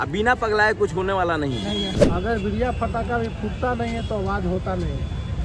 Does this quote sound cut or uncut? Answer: cut